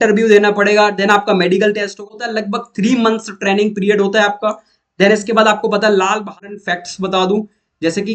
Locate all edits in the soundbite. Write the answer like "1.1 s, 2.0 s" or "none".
2.2 s, 6.4 s